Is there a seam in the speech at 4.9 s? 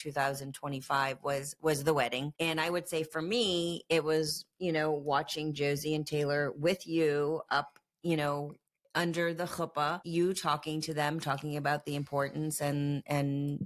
no; 2 cuts; at 2.3 s, 10.0 s

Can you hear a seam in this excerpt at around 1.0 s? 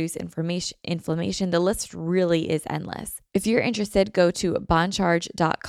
no; 1 cut; at 3.1 s

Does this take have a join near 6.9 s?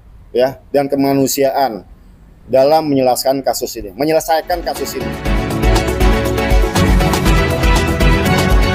no; 1 cut; at 5.2 s

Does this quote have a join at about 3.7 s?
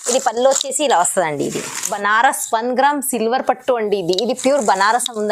no; 1 cut; at 1.9 s

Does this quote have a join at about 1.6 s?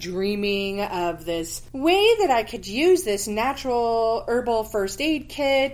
yes; 1 cut; at 1.6 s

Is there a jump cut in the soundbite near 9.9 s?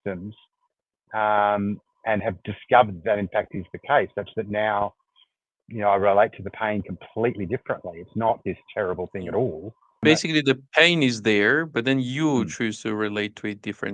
yes; 1 cut; at 9.9 s

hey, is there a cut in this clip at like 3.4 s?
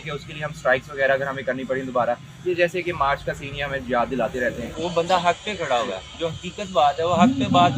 no; 1 cut; at 4.7 s

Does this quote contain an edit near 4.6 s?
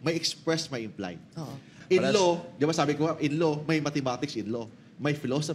no; 1 cut; at 1.8 s

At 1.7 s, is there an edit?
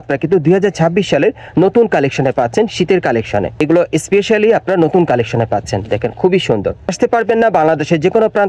no; 2 cuts; at 3.6 s, 6.9 s

